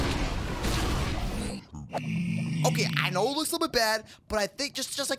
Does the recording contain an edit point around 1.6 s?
yes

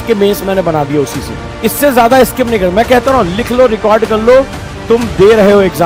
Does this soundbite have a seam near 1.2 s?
no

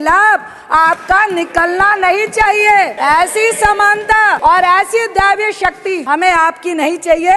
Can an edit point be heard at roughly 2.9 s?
yes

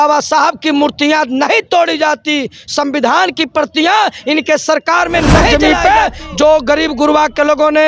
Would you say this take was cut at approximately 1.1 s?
no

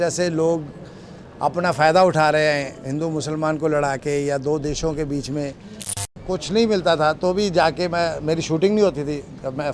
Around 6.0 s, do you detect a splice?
yes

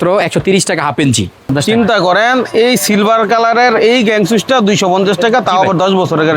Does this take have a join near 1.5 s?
yes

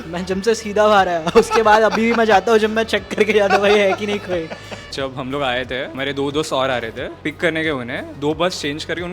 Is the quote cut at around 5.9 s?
yes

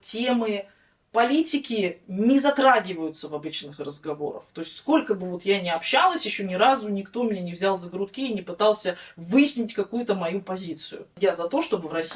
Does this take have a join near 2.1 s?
no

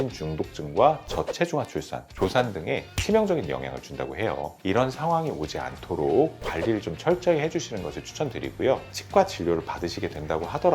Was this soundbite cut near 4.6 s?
yes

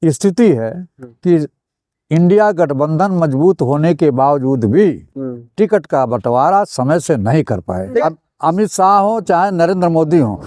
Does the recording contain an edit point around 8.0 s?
yes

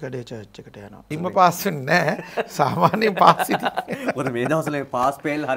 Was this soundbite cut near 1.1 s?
yes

